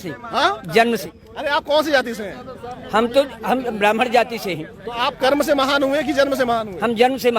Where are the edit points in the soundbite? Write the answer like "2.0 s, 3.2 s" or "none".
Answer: 1.1 s

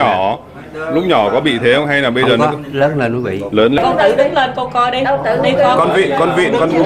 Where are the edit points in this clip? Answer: 3.8 s

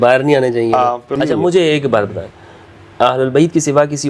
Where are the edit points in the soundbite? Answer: 1.1 s

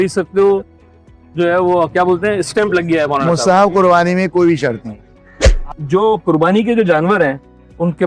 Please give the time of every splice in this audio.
5.7 s

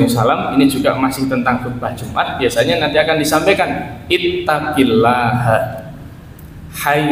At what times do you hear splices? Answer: 2.2 s

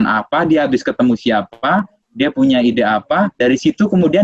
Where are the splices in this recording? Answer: none

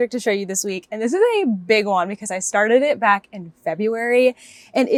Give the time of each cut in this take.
none

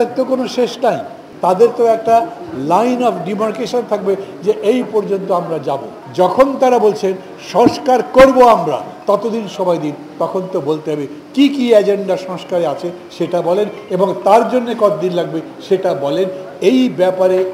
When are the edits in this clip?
1.2 s, 6.0 s

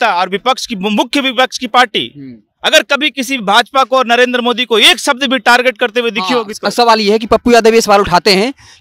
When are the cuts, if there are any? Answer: none

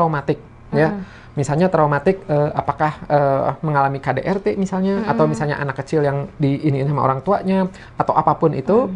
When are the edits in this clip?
none

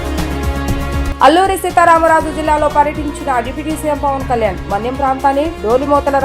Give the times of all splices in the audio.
none

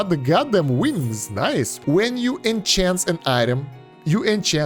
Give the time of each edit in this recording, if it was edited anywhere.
1.7 s

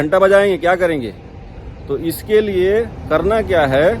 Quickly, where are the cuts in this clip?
none

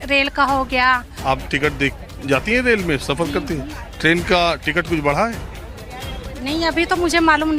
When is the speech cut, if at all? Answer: 1.1 s

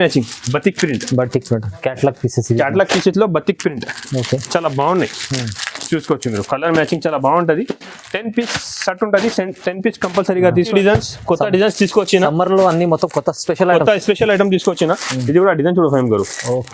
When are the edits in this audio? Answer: 10.7 s

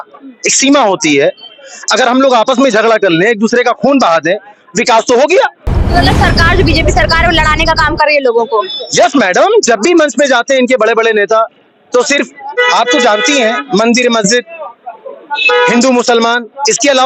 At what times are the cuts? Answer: none

